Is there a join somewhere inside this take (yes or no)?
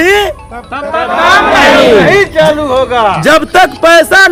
no